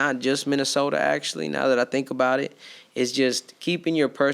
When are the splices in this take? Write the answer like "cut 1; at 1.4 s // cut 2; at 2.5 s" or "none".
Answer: none